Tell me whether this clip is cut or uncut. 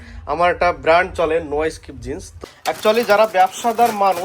cut